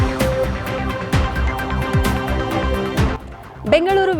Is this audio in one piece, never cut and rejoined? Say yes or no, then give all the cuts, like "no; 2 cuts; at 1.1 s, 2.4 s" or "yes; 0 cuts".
yes; 0 cuts